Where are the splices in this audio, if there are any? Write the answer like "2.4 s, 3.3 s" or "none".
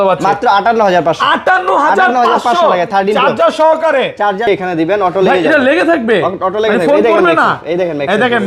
4.4 s